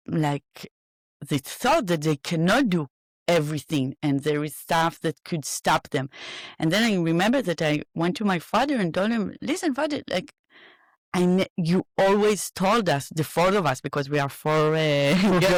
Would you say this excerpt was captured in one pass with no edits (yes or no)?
yes